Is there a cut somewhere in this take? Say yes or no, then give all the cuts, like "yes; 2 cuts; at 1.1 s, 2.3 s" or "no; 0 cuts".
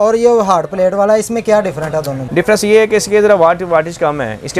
no; 0 cuts